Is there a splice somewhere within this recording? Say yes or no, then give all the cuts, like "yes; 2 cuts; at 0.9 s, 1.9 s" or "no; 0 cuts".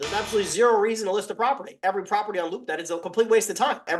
yes; 2 cuts; at 1.8 s, 3.0 s